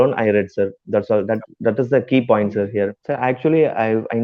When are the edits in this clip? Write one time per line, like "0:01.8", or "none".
0:03.0